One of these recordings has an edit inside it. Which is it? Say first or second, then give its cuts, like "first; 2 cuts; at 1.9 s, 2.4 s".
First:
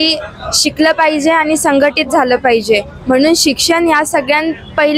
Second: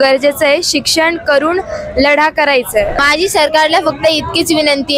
second; 1 cut; at 2.9 s